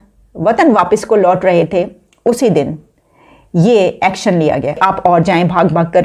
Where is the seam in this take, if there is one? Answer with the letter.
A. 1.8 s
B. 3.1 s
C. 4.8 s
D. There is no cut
C